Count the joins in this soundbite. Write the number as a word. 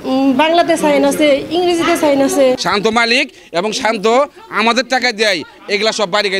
one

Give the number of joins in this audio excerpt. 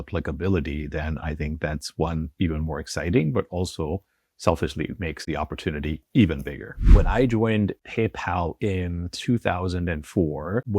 two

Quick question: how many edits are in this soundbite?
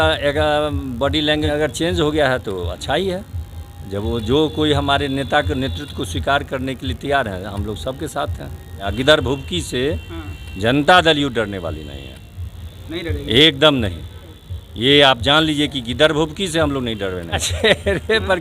three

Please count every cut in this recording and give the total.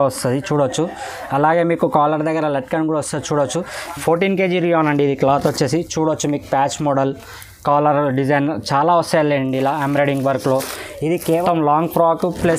two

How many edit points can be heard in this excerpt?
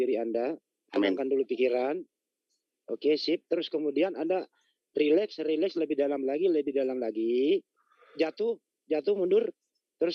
zero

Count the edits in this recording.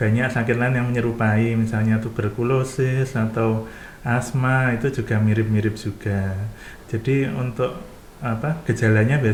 zero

